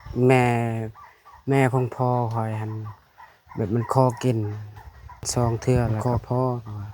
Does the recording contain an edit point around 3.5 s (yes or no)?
no